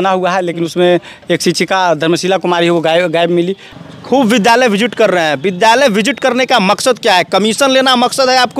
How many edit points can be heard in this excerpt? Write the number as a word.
one